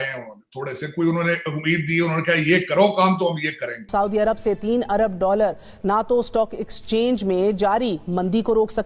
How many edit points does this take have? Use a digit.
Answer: 1